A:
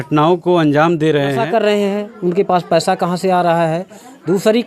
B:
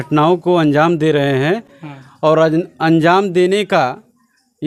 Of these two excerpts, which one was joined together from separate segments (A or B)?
A